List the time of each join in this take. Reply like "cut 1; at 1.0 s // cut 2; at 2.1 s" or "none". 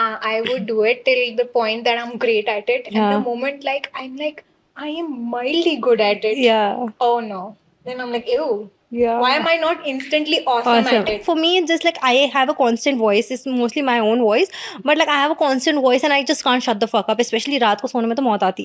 cut 1; at 11.2 s